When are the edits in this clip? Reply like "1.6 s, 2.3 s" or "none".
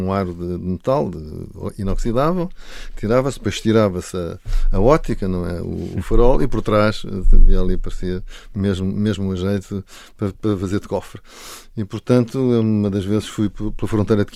none